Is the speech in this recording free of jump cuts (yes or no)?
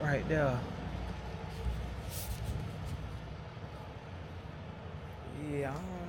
yes